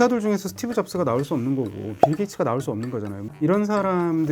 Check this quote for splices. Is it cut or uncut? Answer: cut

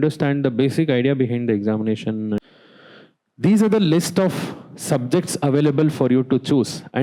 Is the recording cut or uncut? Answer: cut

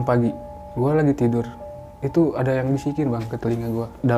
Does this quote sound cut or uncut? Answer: uncut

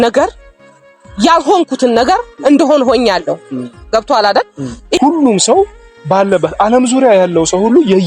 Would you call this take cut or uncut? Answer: cut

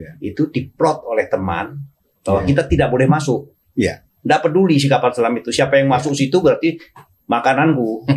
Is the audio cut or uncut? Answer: uncut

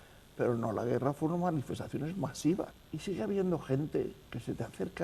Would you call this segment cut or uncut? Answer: cut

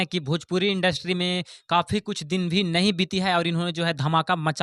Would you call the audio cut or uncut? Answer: uncut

